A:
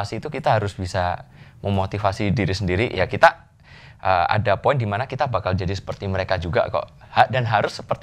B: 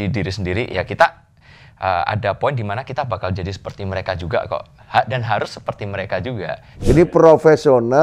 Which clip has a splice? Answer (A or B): B